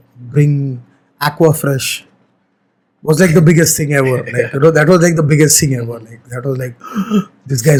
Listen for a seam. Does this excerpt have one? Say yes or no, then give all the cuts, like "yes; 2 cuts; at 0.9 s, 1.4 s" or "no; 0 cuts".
no; 0 cuts